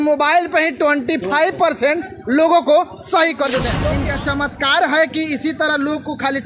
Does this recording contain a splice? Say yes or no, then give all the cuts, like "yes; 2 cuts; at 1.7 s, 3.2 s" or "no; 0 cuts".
yes; 1 cut; at 3.7 s